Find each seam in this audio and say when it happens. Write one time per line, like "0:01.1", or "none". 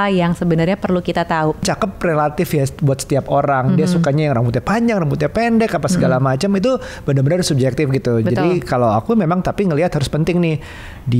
0:01.7